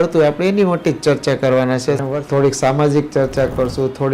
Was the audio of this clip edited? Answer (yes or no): yes